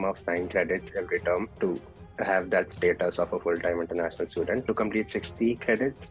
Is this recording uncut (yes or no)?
no